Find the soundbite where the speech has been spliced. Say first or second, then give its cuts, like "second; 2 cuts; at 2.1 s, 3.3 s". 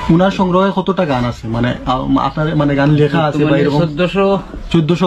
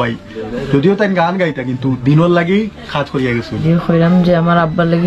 second; 1 cut; at 3.6 s